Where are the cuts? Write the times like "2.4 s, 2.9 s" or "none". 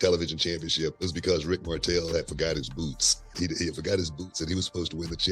0.9 s, 3.3 s